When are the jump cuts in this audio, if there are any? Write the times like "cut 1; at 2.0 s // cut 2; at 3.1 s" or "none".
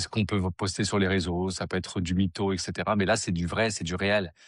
none